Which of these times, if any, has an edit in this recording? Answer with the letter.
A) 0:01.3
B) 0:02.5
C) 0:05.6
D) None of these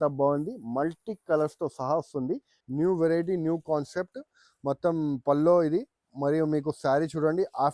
B